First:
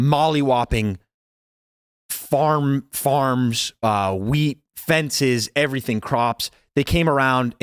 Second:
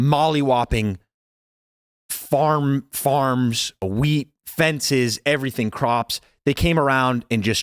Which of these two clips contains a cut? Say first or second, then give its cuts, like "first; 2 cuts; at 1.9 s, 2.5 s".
second; 1 cut; at 3.8 s